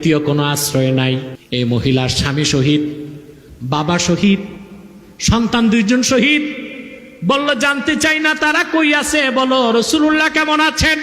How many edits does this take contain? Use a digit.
1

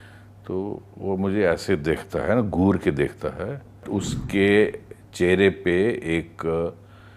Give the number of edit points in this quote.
1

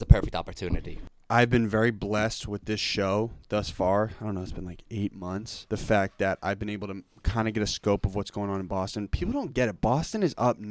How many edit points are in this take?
2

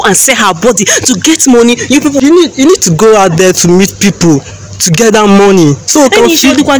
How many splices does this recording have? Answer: 1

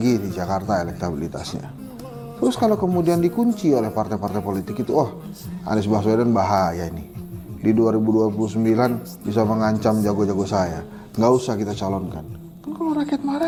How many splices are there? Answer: 0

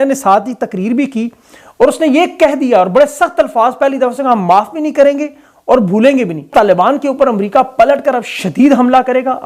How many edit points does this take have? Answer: 1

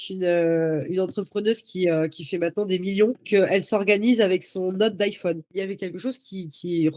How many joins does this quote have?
1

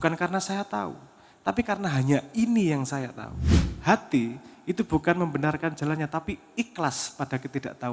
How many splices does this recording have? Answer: 1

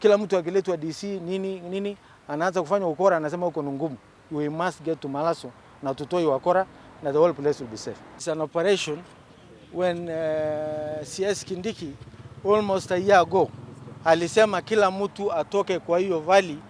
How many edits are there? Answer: 0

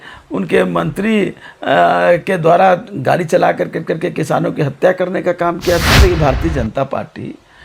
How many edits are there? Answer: 1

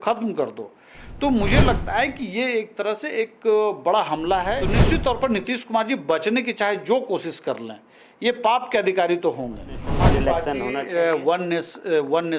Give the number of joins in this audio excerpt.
2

